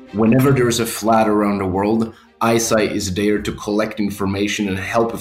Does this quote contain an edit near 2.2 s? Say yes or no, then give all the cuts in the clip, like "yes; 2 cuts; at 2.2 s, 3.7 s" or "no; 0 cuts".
no; 0 cuts